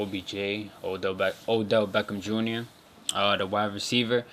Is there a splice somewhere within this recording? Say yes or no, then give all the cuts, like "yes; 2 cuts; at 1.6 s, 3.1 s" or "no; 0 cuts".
no; 0 cuts